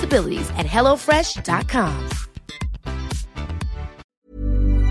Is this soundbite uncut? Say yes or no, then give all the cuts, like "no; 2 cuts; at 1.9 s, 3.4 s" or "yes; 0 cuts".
no; 1 cut; at 4.0 s